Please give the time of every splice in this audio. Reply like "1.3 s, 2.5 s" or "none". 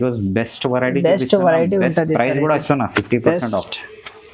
none